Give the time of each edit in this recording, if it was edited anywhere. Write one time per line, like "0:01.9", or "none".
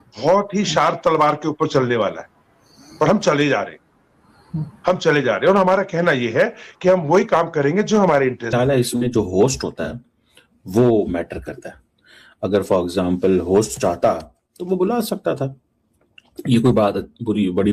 none